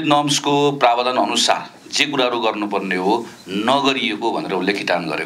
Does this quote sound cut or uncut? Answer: uncut